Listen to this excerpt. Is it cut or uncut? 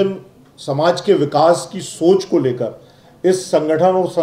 uncut